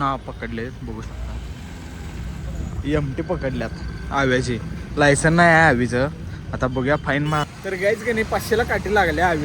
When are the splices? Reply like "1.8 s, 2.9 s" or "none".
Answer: 7.5 s